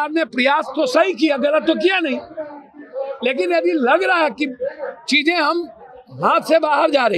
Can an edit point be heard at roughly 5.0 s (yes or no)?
no